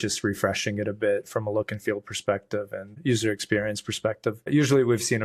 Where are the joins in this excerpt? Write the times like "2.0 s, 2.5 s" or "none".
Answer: none